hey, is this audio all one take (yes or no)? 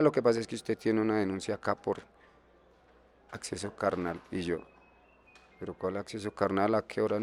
yes